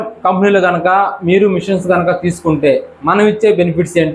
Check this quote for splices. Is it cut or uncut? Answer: uncut